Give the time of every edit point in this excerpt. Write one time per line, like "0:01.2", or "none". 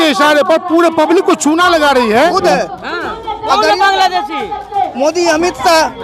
0:02.3

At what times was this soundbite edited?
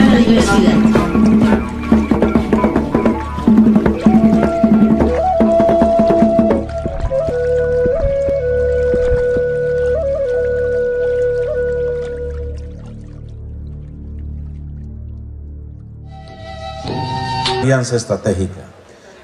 none

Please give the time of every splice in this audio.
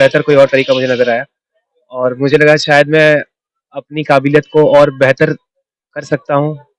none

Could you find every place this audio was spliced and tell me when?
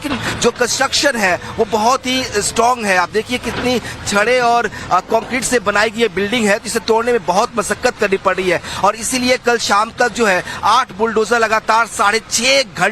0:02.8

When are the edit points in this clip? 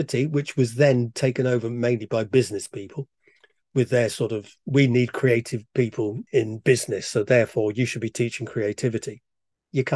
0:06.2

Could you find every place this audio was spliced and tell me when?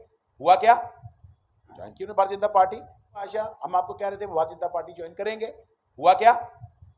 0:03.3

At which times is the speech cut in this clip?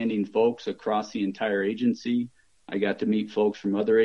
none

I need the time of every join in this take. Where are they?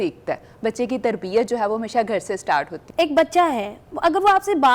0:02.8

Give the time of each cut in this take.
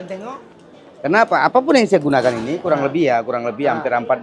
none

